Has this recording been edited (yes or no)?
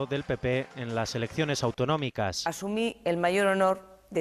yes